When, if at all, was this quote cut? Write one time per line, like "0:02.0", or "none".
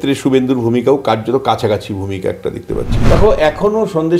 0:03.0